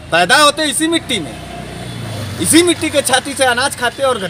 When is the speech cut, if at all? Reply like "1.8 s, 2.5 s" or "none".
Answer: none